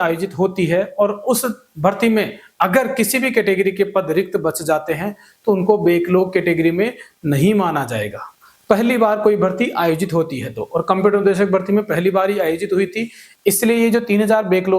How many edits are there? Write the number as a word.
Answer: zero